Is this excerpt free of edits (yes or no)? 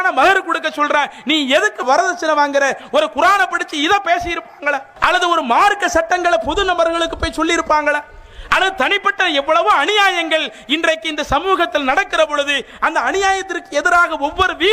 no